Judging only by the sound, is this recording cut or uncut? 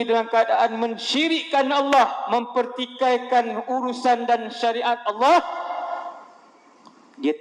uncut